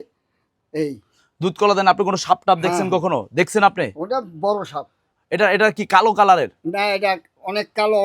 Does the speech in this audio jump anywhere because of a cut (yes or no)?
yes